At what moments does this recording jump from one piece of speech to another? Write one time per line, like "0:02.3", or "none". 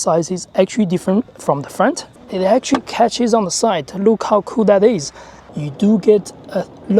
0:02.1
0:05.4